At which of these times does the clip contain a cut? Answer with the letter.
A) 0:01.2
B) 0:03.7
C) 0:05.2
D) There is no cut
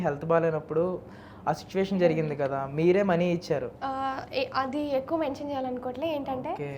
D